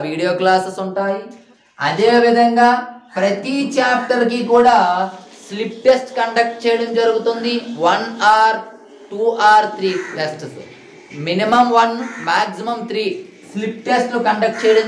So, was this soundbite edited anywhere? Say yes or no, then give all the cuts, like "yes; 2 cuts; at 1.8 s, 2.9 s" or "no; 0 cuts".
no; 0 cuts